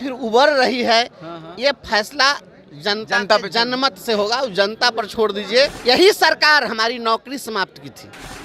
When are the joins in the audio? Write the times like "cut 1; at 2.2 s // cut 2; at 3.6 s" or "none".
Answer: cut 1; at 5.8 s